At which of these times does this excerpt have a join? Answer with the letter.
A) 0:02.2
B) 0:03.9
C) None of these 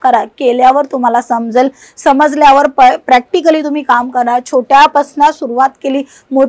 C